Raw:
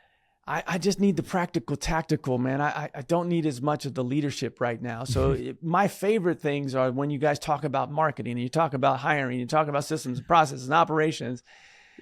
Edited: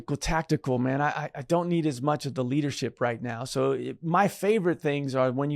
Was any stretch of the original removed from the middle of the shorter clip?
no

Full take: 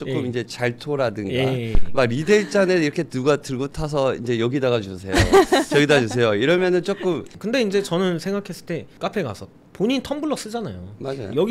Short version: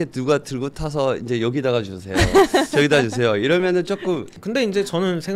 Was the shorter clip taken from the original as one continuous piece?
yes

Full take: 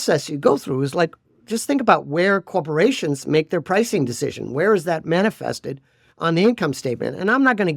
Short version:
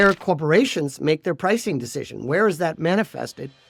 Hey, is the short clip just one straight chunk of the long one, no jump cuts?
yes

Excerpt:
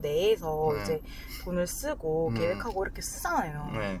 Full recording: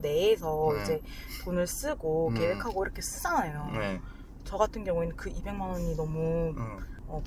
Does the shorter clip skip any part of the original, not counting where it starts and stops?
no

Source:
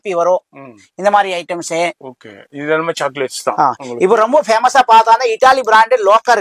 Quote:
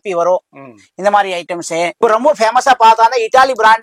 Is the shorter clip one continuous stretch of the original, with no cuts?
no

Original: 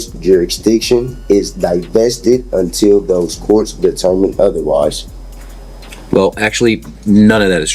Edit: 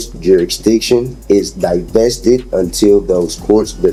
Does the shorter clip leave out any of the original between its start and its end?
no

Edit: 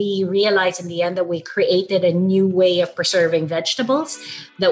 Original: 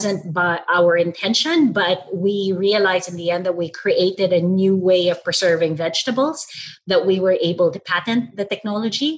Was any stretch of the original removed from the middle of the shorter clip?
no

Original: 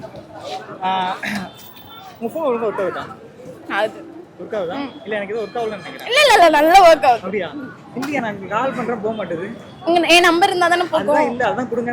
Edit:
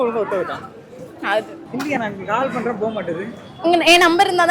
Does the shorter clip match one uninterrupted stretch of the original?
no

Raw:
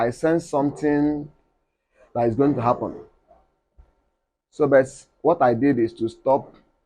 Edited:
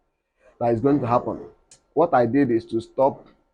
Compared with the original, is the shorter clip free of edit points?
no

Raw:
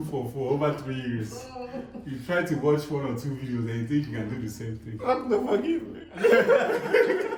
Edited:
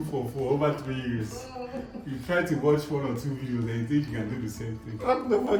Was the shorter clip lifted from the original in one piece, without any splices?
yes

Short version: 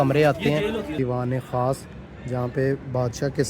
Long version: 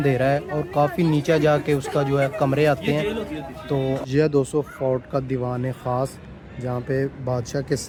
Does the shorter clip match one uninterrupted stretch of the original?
no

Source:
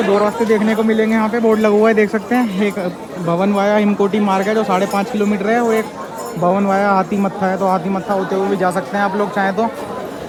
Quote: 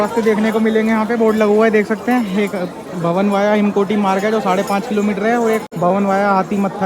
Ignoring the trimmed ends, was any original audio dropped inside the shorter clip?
yes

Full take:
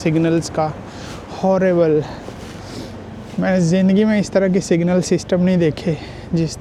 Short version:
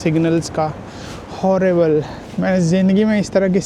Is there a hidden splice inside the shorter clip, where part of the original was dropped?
yes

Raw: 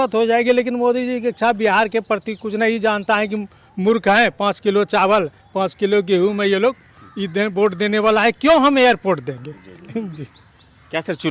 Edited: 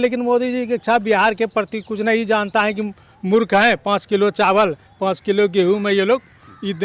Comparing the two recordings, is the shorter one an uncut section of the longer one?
yes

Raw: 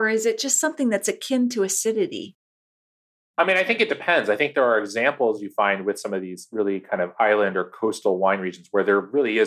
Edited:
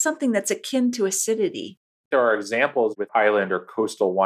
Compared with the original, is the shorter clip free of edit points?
no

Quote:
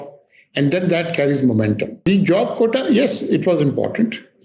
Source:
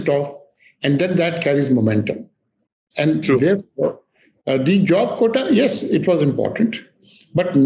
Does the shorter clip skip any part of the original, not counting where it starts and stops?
yes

